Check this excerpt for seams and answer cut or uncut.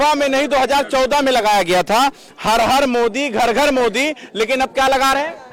uncut